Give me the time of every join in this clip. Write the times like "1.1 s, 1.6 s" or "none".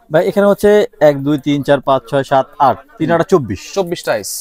none